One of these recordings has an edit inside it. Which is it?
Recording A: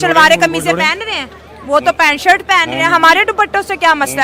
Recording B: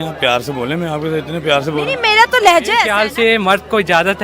B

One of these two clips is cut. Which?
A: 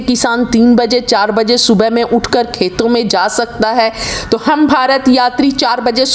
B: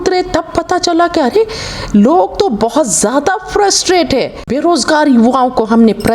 B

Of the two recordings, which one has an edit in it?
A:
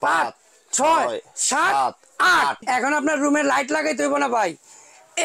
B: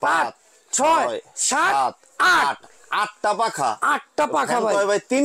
A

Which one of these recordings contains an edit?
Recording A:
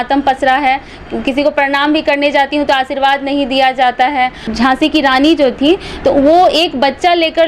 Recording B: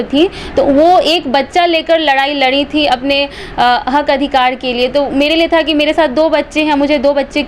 A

